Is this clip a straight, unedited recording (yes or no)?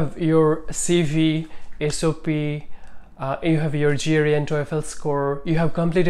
yes